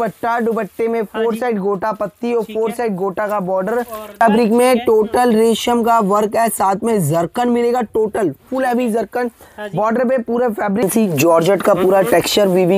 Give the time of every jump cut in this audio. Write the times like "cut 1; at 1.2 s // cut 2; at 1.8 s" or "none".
cut 1; at 4.2 s // cut 2; at 10.8 s